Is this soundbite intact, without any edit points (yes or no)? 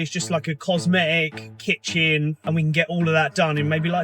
no